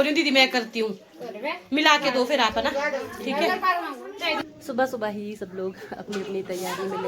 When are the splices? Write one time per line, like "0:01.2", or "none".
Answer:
0:04.5